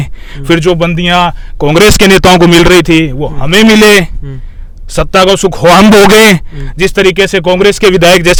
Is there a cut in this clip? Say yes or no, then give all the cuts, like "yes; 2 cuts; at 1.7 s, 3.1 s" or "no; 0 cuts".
no; 0 cuts